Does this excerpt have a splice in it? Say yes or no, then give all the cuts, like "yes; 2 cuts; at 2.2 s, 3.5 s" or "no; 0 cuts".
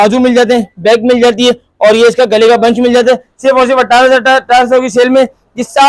no; 0 cuts